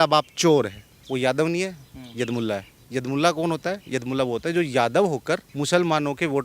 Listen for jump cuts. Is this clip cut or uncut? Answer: cut